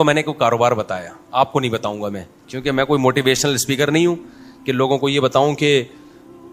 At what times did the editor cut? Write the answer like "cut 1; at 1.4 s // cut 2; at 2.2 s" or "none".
none